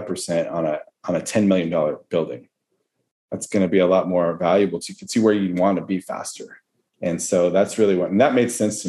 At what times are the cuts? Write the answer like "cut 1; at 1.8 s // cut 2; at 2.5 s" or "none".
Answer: none